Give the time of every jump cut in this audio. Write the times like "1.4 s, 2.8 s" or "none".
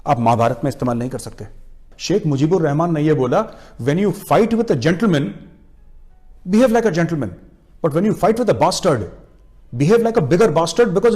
1.9 s